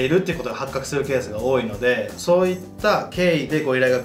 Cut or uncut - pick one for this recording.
uncut